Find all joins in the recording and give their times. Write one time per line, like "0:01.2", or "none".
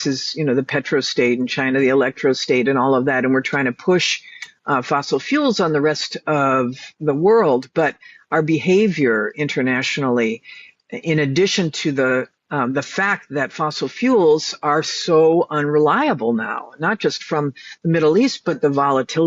none